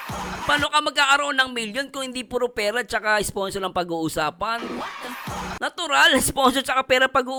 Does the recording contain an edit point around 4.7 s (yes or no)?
no